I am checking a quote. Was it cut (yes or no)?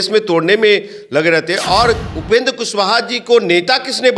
yes